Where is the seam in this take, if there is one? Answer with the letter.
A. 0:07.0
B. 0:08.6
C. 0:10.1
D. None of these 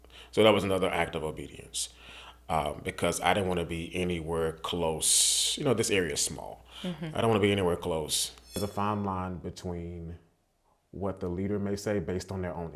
B